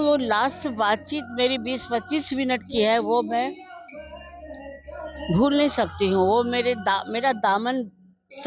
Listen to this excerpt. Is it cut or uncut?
uncut